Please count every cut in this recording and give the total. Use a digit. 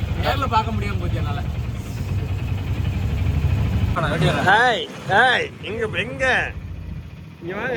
0